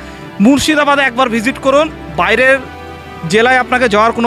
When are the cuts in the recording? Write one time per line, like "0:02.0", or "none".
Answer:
none